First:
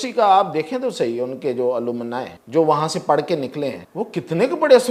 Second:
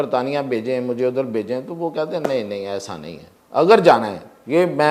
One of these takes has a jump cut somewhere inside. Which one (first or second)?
first